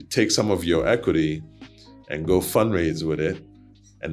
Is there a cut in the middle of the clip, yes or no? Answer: no